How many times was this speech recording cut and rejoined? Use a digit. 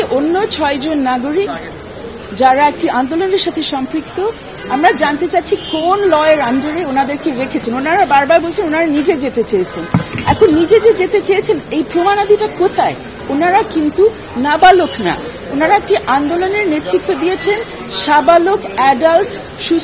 2